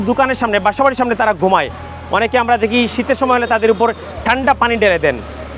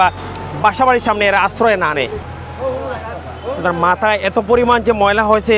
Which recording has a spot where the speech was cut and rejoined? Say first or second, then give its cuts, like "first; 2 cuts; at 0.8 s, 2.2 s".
second; 1 cut; at 2.2 s